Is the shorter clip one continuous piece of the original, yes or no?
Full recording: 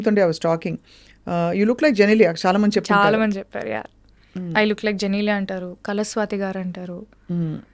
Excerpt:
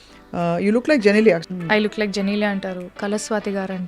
no